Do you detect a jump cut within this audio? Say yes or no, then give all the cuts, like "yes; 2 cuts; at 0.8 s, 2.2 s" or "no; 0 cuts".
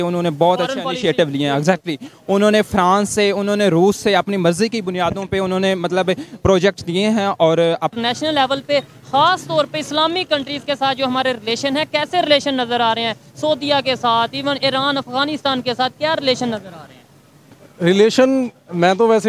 yes; 1 cut; at 7.9 s